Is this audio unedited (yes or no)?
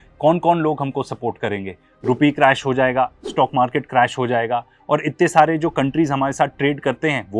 yes